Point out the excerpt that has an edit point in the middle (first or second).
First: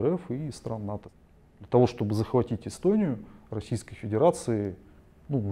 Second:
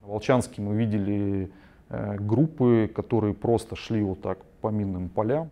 first